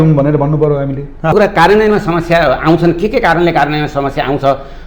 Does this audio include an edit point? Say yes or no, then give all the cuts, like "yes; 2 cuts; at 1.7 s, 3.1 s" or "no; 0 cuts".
yes; 1 cut; at 1.3 s